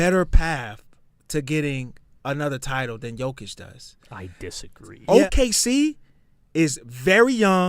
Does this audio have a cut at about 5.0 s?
yes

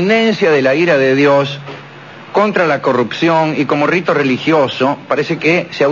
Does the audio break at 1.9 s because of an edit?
no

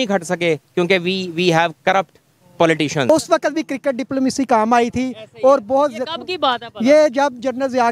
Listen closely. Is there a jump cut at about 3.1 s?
yes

